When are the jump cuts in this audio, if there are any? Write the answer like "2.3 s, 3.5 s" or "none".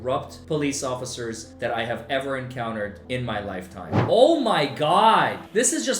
4.0 s

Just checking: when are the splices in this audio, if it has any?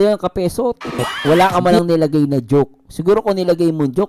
1.1 s

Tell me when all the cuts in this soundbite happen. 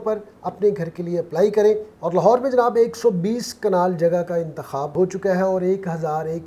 1.9 s

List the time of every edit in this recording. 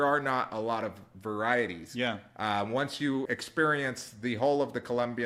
none

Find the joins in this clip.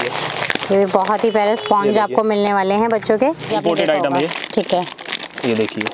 3.5 s

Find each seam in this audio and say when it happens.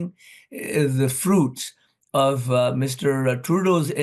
none

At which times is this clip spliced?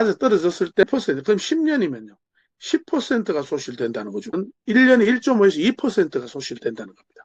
0.8 s, 4.3 s

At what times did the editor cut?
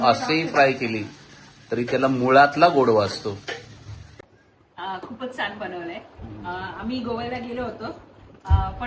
4.2 s

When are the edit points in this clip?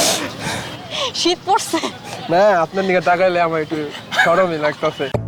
none

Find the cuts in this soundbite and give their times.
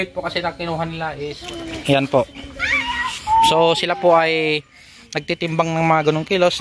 1.4 s

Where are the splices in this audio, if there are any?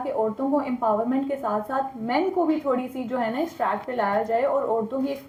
none

